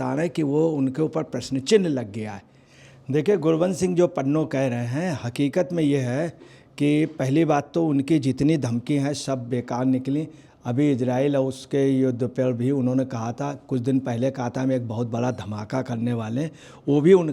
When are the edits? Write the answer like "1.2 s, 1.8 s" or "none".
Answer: 2.6 s